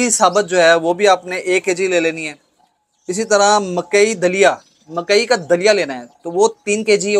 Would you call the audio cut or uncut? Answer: uncut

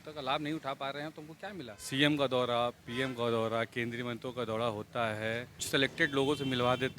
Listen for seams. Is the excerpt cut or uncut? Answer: cut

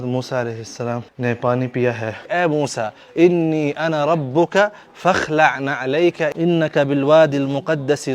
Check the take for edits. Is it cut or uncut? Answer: cut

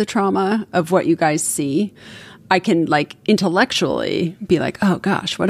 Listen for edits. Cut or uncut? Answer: uncut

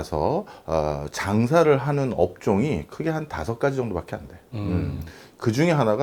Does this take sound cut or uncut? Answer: uncut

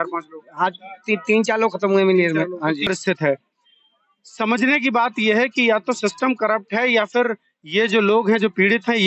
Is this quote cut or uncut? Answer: cut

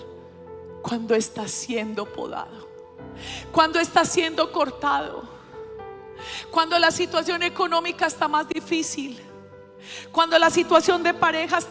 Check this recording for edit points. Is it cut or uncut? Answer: uncut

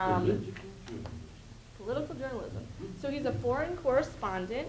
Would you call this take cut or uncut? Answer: uncut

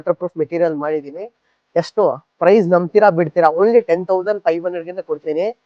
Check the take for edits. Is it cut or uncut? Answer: uncut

